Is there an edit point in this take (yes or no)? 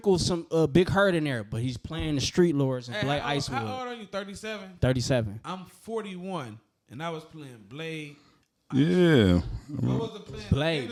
no